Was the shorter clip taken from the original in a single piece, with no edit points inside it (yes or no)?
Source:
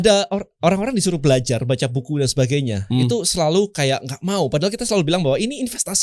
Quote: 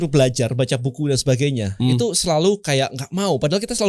yes